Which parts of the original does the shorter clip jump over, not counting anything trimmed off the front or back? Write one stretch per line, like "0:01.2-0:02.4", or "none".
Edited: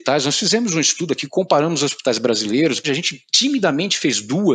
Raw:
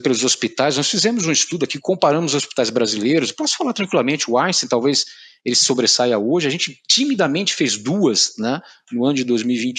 0:03.4-0:06.4